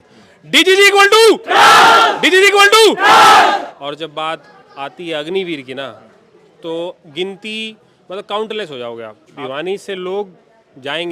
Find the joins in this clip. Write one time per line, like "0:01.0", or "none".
0:03.7
0:09.4